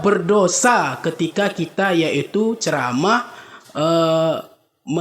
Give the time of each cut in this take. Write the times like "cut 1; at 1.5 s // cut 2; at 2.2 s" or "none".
none